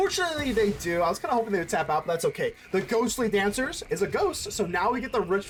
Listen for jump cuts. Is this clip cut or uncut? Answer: uncut